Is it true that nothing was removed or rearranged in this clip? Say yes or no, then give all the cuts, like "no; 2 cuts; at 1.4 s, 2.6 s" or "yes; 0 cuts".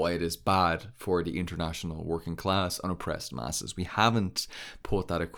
yes; 0 cuts